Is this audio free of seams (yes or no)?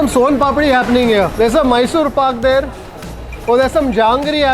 no